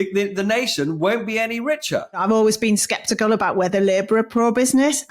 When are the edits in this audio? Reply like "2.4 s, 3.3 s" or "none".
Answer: 2.2 s